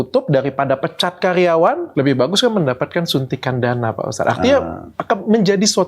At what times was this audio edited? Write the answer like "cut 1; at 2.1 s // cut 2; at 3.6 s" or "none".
cut 1; at 1.8 s